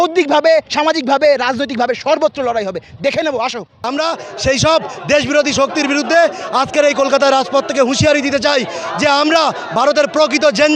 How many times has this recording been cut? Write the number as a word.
one